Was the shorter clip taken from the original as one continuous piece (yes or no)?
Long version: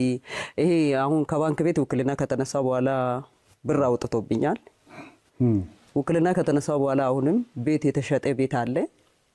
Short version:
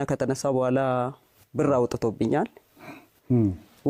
yes